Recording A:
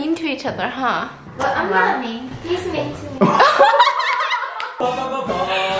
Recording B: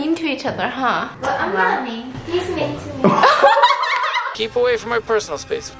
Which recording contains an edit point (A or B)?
B